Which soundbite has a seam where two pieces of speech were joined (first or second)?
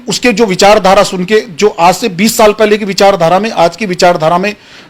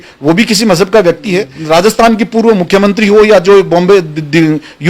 second